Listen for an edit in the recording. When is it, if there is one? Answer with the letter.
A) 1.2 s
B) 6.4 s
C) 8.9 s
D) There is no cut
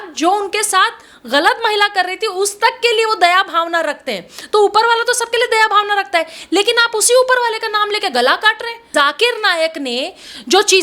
C